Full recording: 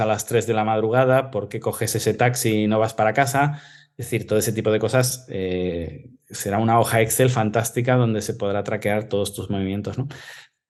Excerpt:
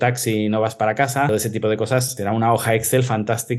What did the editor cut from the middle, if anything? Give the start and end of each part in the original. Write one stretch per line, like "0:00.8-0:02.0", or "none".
0:03.5-0:04.3
0:05.1-0:06.4